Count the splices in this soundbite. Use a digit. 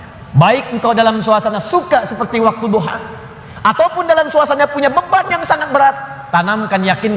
0